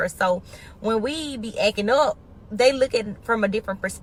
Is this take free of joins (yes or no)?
yes